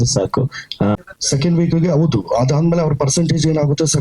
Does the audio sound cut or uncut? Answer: cut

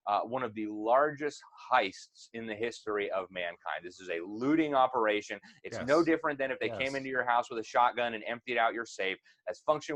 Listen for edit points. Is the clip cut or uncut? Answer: uncut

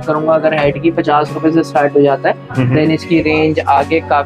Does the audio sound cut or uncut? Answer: uncut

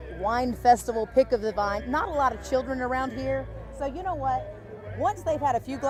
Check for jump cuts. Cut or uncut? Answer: uncut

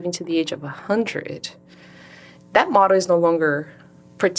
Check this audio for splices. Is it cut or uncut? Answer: uncut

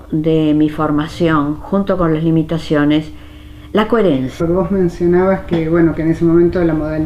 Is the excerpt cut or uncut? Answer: uncut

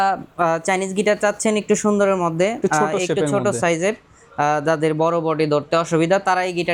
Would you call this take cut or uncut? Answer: uncut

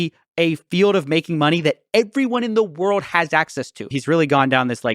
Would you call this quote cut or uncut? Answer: cut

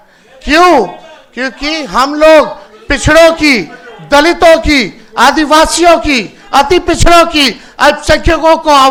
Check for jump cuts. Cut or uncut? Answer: uncut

